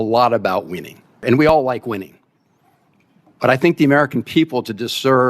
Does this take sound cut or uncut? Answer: cut